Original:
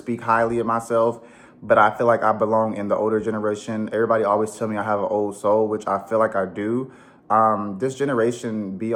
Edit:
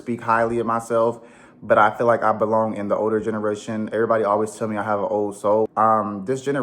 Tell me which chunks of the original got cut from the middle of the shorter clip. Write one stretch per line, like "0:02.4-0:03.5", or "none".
0:05.7-0:07.2